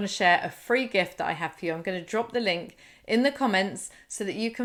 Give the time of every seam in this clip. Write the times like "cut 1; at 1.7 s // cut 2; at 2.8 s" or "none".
none